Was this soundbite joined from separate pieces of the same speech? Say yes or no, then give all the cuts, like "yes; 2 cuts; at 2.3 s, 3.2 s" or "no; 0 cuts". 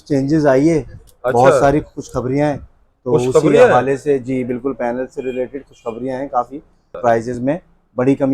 yes; 1 cut; at 7.0 s